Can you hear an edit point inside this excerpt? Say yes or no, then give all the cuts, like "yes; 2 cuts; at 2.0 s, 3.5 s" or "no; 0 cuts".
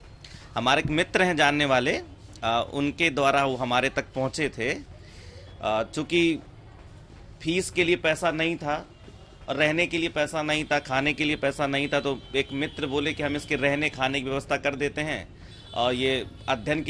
no; 0 cuts